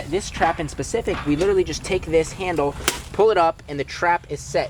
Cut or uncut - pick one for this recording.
uncut